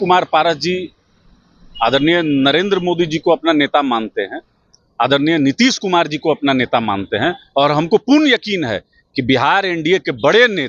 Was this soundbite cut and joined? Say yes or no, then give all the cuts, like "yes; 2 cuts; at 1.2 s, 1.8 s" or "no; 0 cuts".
no; 0 cuts